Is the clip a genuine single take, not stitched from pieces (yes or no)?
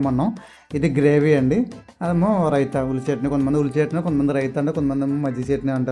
yes